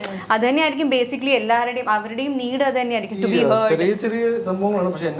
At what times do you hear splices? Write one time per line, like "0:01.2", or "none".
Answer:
none